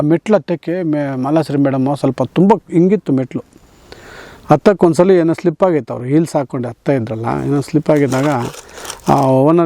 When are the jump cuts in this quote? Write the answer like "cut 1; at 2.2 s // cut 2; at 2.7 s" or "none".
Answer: none